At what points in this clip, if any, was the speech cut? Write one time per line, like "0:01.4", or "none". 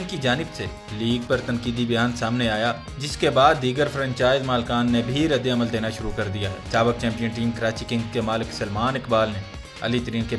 none